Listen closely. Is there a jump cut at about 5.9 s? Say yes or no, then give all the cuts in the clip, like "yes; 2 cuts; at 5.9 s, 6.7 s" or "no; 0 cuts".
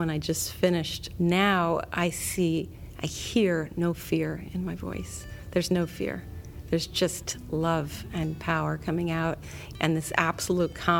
no; 1 cut; at 1.0 s